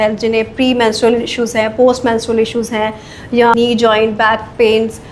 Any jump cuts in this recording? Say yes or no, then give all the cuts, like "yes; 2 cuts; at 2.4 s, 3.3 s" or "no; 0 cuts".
yes; 1 cut; at 3.5 s